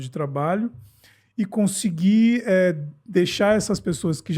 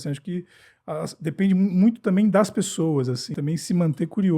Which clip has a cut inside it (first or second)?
second